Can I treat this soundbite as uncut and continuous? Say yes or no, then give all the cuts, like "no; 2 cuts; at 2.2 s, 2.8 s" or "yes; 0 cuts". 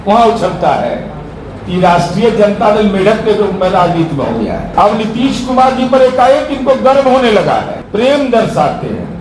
no; 2 cuts; at 4.7 s, 7.8 s